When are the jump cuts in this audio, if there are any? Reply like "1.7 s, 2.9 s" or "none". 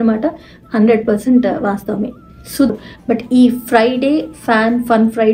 2.7 s